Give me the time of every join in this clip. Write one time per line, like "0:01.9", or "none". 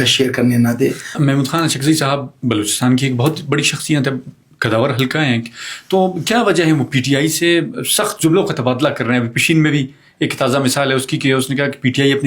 0:01.1